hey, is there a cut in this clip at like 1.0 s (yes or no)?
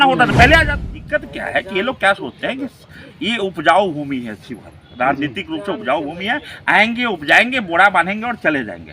yes